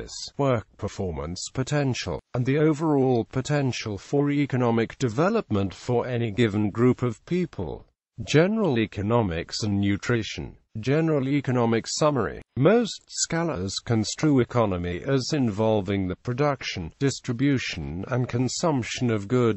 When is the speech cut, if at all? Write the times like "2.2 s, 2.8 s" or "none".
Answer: 16.2 s, 17.6 s